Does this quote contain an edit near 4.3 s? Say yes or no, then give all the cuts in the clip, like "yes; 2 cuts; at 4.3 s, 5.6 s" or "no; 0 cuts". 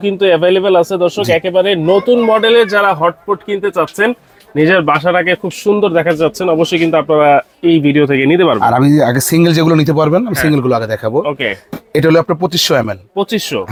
no; 0 cuts